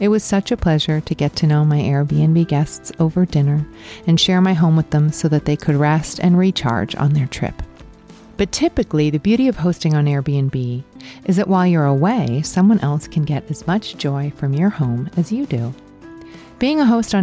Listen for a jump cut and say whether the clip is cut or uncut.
uncut